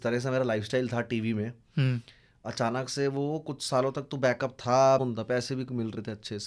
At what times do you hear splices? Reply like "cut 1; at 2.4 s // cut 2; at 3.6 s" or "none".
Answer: cut 1; at 5.0 s

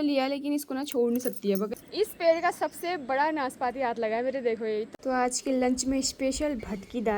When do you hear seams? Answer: cut 1; at 1.7 s // cut 2; at 4.9 s

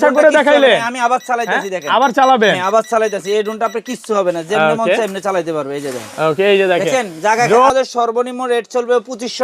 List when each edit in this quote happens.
cut 1; at 7.7 s

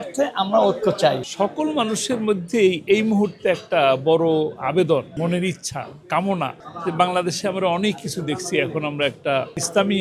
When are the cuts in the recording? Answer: cut 1; at 1.2 s

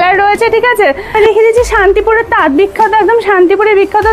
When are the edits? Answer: cut 1; at 1.1 s

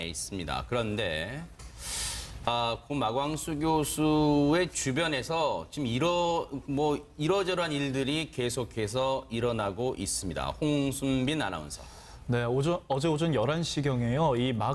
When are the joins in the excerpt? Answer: none

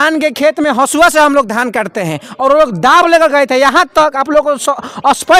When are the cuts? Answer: none

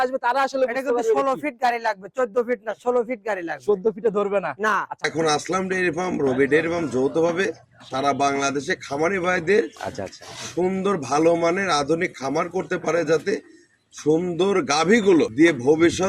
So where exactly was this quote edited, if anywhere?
cut 1; at 5.0 s // cut 2; at 15.3 s

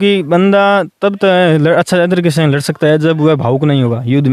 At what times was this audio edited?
none

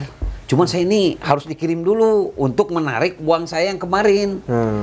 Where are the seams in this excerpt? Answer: none

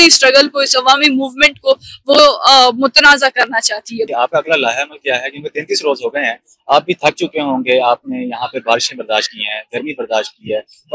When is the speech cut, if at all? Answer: cut 1; at 4.1 s

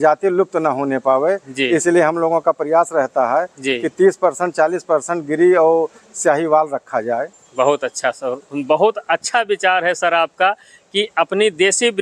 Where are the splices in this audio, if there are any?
none

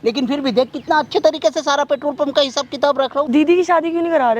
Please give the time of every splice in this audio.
cut 1; at 3.3 s

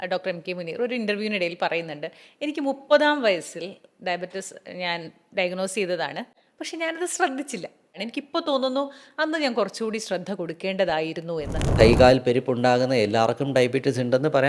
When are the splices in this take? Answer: cut 1; at 8.0 s // cut 2; at 11.7 s

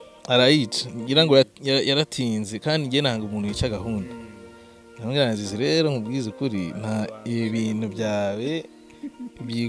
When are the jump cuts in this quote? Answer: none

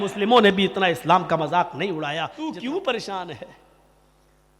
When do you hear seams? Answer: cut 1; at 2.3 s

